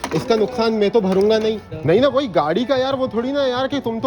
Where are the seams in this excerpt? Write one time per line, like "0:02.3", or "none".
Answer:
0:01.7